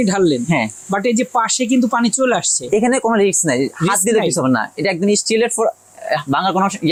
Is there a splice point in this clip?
no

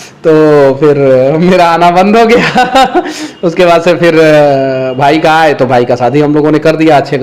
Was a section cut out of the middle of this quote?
no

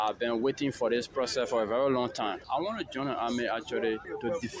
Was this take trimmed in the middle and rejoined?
no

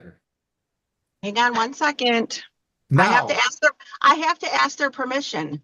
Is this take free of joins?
yes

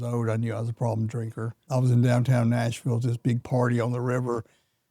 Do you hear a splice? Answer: yes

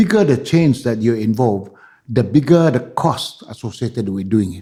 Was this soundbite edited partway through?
no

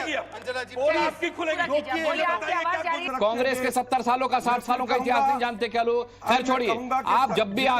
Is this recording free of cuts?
no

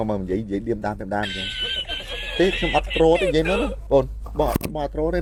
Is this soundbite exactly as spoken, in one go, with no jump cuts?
yes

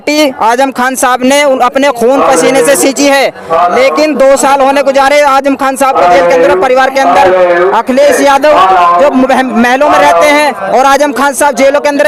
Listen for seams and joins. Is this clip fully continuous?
yes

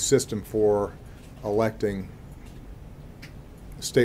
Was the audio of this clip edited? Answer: no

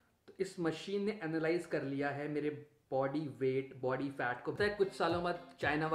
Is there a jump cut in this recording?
yes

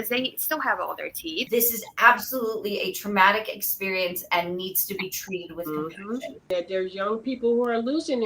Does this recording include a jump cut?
yes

